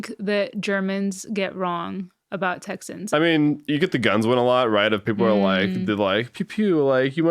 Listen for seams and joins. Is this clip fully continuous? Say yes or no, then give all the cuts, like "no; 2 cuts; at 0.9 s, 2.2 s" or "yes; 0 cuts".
no; 1 cut; at 3.1 s